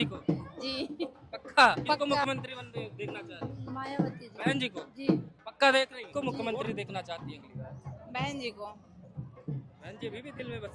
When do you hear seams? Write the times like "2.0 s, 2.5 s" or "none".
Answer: 2.0 s, 6.0 s